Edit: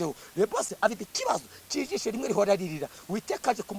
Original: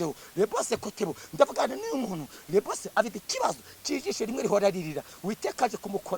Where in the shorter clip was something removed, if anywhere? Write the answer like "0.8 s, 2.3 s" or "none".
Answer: 0.9 s

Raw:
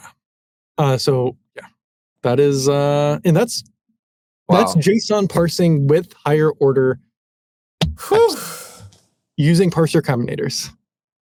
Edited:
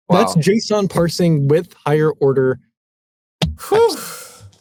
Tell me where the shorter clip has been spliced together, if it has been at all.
none

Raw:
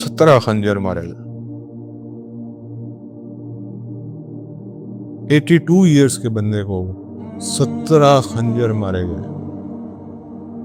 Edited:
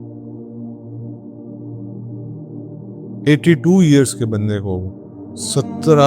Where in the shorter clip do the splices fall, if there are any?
3.2 s

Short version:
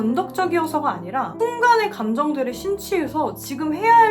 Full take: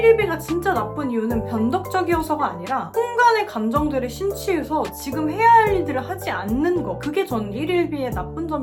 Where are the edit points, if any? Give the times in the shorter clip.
none

